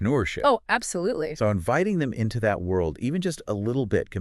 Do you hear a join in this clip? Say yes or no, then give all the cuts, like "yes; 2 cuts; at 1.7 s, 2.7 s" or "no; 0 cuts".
no; 0 cuts